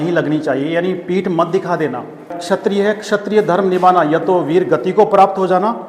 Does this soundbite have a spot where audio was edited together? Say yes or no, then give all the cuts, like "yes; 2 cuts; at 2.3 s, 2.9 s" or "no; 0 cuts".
yes; 1 cut; at 2.4 s